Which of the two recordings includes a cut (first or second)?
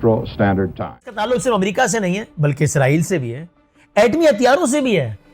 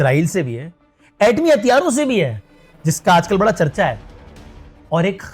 first